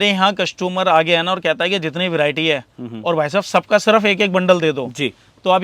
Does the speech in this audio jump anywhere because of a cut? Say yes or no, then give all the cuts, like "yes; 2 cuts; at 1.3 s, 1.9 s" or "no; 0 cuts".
no; 0 cuts